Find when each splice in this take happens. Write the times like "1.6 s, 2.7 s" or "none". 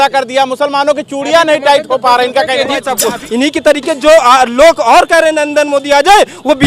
2.9 s